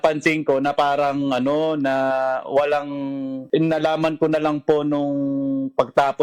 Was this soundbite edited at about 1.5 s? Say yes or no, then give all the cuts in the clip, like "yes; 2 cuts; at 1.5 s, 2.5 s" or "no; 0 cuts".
no; 1 cut; at 3.4 s